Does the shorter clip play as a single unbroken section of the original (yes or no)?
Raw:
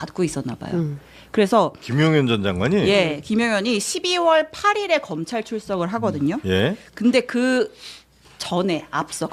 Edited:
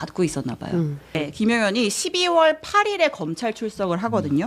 no